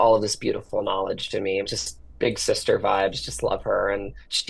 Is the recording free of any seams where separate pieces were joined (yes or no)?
yes